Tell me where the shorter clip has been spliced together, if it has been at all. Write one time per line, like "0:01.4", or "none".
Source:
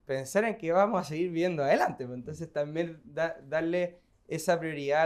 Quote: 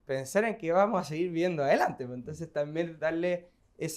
0:02.9